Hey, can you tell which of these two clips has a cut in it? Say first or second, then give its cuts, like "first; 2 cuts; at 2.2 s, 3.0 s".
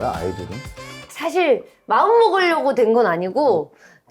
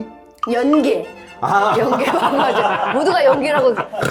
first; 1 cut; at 1.0 s